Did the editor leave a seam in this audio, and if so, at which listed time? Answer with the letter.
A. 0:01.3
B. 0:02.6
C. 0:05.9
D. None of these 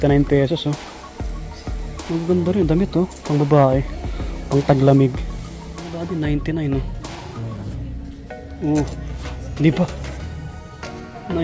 C